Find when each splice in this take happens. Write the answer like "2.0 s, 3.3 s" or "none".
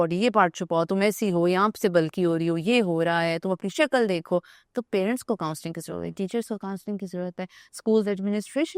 none